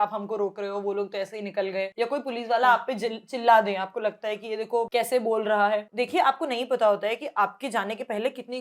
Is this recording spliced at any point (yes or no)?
yes